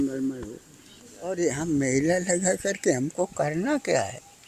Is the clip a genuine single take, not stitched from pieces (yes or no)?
no